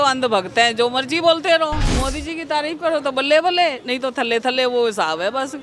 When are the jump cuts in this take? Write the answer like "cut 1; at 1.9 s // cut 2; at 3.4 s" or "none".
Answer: cut 1; at 1.9 s